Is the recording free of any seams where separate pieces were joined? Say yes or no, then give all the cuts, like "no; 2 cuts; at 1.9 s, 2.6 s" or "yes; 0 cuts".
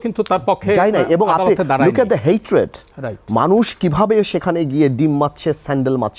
yes; 0 cuts